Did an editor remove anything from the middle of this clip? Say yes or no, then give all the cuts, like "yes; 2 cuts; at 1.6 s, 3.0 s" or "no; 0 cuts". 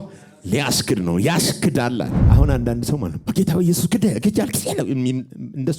yes; 1 cut; at 2.2 s